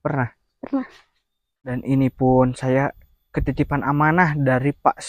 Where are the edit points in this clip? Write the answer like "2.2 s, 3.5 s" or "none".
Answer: 1.7 s